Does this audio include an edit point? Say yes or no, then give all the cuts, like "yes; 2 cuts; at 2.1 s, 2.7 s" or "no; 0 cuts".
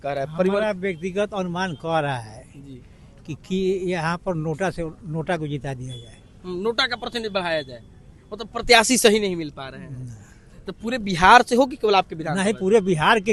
no; 0 cuts